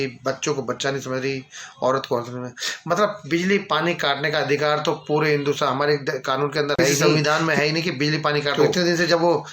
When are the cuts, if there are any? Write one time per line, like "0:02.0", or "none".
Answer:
0:07.0
0:08.5